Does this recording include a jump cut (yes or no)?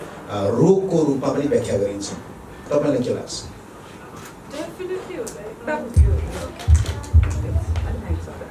no